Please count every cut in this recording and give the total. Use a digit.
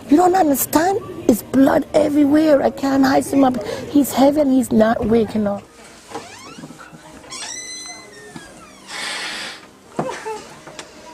1